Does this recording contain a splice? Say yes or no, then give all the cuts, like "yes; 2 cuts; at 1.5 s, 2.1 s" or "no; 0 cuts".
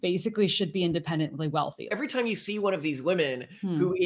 yes; 1 cut; at 1.9 s